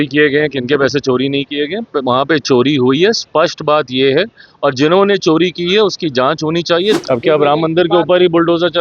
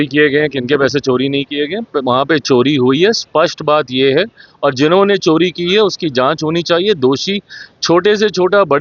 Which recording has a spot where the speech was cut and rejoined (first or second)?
first